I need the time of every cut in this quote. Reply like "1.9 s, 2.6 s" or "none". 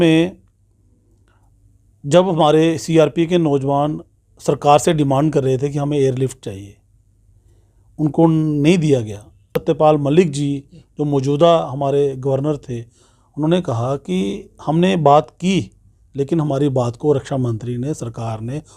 9.6 s

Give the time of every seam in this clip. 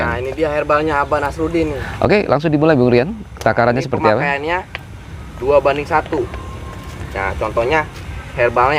1.8 s

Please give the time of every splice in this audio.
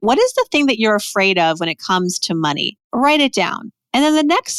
2.8 s

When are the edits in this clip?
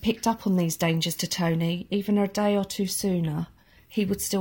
none

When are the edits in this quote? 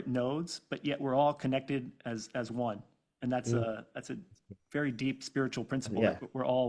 none

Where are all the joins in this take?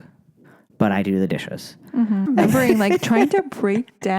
2.3 s

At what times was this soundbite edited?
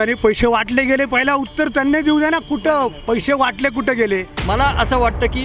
4.3 s

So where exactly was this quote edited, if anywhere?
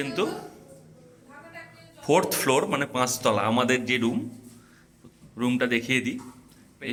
none

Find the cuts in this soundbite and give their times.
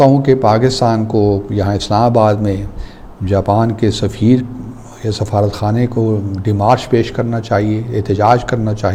none

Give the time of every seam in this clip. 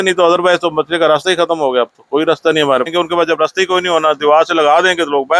2.9 s

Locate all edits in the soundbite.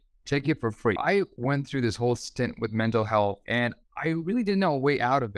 1.3 s, 3.4 s

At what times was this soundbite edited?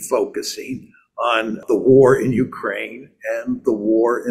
1.6 s

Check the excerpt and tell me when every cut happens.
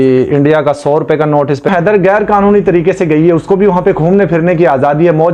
1.7 s

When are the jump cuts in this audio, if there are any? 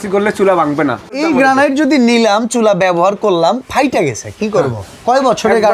1.2 s

